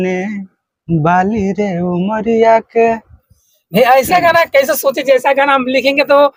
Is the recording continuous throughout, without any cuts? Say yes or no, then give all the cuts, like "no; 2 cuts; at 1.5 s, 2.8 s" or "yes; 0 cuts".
yes; 0 cuts